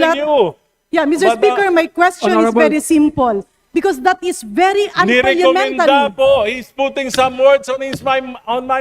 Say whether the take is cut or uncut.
cut